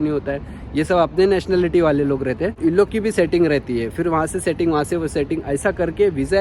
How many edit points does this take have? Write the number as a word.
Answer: one